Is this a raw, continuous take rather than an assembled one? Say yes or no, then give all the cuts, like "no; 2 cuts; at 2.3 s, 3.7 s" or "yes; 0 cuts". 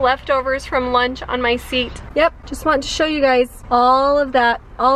yes; 0 cuts